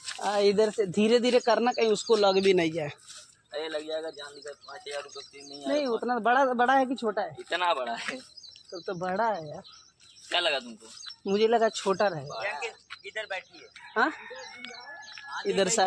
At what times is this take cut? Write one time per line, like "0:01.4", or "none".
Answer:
none